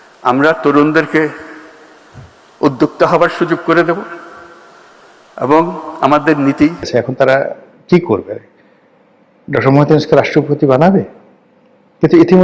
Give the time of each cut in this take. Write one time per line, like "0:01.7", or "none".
0:06.9

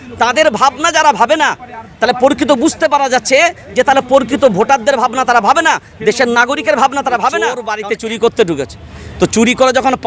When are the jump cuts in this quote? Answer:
0:07.7

